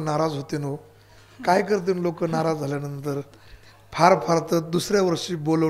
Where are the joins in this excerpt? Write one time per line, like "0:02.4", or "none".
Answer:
none